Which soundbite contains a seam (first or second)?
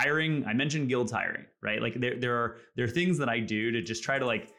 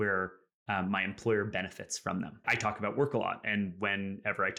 second